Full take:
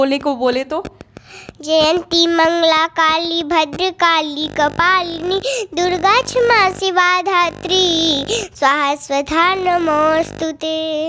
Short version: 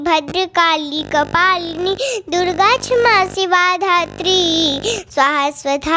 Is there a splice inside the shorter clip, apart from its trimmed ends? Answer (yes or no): no